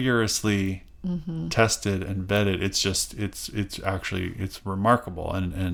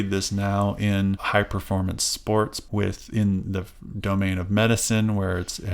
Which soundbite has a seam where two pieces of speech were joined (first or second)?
second